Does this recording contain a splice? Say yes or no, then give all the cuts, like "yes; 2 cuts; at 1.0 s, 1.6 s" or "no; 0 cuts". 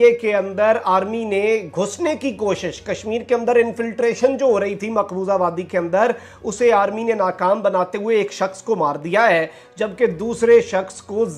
no; 0 cuts